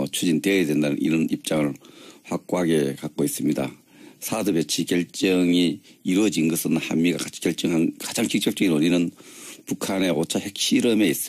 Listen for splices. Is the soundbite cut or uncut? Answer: uncut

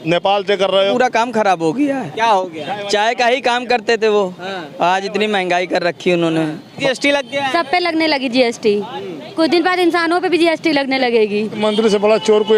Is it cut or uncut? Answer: cut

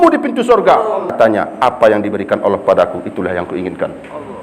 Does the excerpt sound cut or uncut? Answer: cut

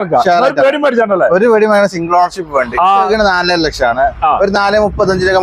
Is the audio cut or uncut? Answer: cut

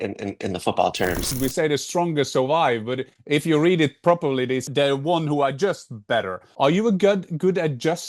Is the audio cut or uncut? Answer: cut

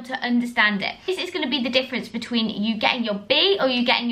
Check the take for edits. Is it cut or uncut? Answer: cut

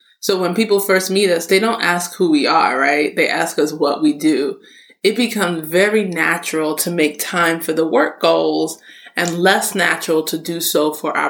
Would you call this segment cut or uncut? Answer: uncut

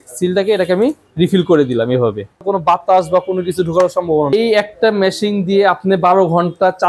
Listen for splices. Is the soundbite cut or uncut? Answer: cut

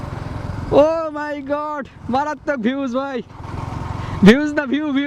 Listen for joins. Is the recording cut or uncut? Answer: uncut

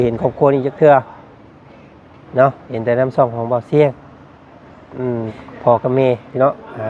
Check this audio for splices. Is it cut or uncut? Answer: cut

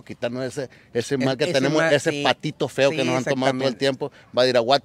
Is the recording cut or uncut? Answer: uncut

